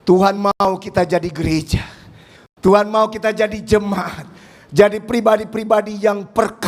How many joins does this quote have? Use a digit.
0